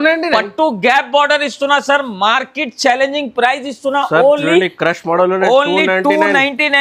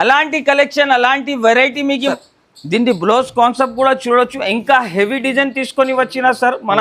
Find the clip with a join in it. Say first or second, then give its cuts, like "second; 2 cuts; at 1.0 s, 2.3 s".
second; 1 cut; at 2.1 s